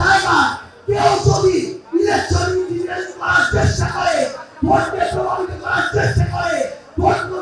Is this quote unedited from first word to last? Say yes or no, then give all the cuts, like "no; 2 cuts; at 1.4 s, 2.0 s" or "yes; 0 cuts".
yes; 0 cuts